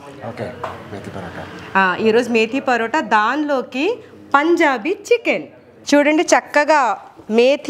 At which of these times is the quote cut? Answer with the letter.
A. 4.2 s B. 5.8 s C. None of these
B